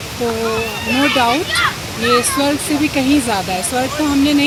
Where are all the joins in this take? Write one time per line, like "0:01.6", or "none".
none